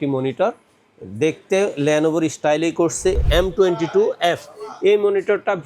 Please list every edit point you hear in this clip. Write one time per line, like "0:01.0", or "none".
0:03.2